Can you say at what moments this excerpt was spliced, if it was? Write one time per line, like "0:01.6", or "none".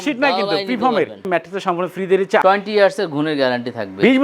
0:01.2
0:02.4